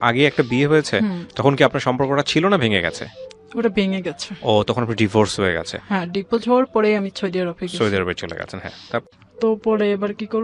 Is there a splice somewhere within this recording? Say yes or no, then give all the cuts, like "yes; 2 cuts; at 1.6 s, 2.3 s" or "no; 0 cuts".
yes; 1 cut; at 9.0 s